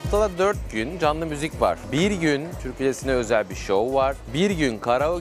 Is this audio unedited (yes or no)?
no